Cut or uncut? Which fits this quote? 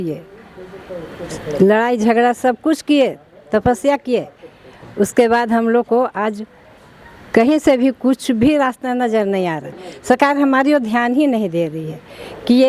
uncut